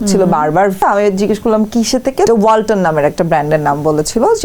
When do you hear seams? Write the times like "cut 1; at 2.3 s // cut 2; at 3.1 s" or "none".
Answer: cut 1; at 0.8 s // cut 2; at 2.3 s